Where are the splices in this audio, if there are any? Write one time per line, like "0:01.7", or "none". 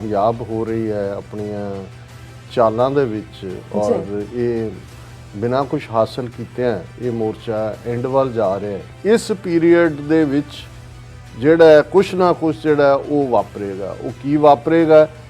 0:08.8